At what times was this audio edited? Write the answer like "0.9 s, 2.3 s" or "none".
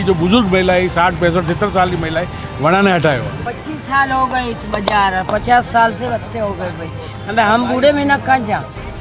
3.4 s

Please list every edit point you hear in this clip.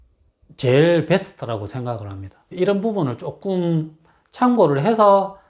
2.4 s

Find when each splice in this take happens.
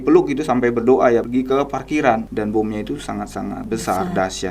1.3 s, 2.3 s, 3.6 s

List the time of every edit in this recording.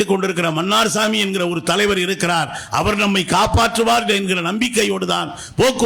none

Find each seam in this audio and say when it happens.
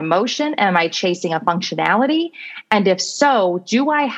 none

